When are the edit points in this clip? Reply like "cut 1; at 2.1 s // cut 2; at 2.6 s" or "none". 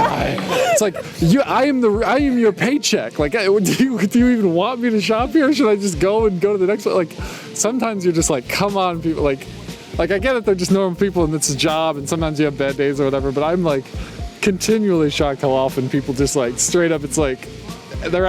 none